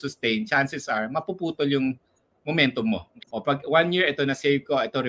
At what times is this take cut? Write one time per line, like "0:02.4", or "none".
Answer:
0:03.1